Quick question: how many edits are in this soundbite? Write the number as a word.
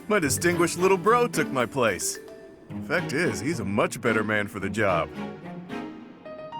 one